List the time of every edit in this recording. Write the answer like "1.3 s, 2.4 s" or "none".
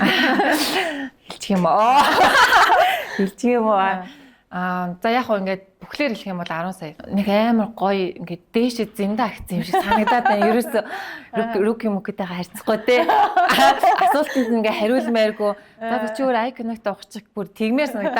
7.0 s